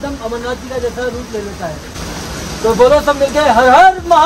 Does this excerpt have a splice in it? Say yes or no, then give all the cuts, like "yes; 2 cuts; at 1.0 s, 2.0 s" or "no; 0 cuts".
yes; 1 cut; at 2.0 s